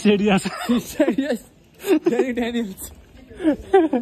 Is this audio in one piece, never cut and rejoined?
yes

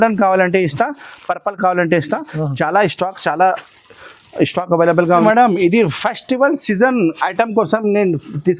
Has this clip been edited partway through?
yes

